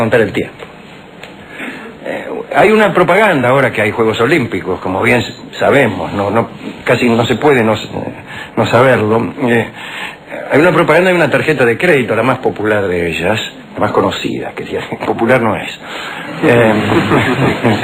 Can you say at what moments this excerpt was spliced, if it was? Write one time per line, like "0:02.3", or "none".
none

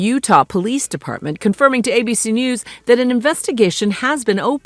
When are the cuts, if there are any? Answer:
none

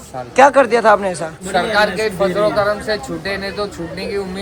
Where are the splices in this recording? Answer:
0:01.4

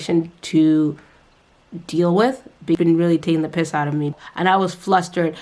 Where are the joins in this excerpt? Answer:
0:02.8
0:04.1

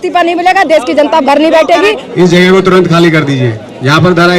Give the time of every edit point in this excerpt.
0:02.0

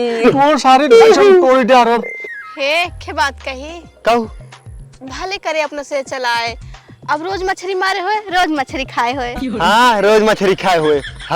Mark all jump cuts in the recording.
0:02.2

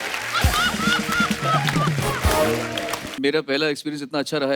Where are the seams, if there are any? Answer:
0:03.1

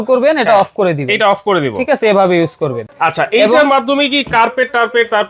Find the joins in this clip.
none

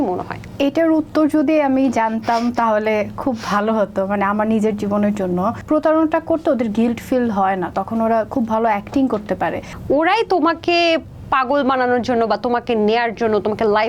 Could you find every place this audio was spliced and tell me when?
0:05.6
0:09.7

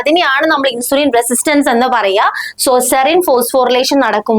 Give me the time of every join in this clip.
0:02.5

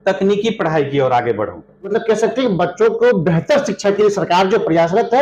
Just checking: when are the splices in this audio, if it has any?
0:01.9

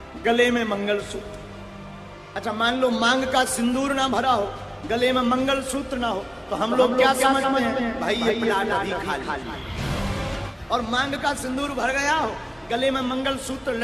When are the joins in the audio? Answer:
0:10.5

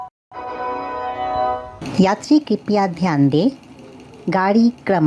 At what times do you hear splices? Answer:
none

